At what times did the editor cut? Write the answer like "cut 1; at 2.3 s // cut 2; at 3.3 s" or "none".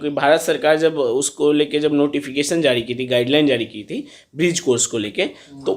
none